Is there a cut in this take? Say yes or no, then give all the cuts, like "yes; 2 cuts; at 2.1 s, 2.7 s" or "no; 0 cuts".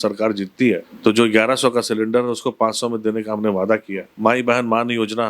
yes; 2 cuts; at 0.9 s, 4.1 s